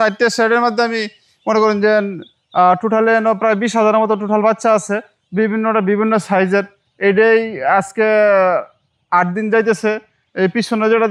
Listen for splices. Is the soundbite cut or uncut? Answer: uncut